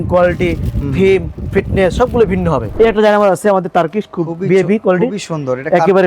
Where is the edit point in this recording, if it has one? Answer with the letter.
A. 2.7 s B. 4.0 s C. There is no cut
A